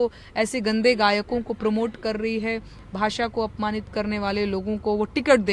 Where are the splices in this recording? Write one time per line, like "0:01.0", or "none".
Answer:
none

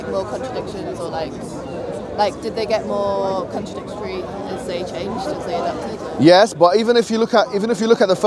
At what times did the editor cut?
none

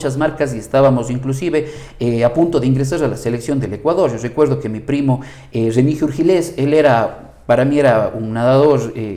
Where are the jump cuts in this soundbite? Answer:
none

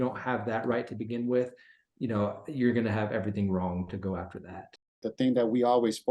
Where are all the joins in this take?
0:05.1

